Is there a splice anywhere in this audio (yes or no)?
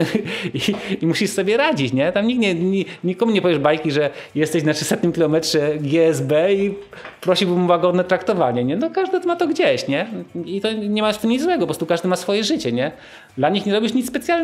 no